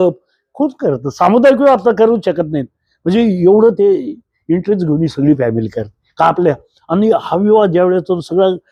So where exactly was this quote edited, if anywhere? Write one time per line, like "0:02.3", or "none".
none